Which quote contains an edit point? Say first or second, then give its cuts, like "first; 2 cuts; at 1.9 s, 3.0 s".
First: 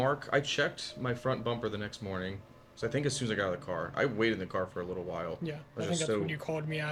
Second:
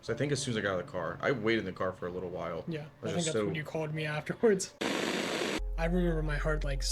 second; 1 cut; at 5.1 s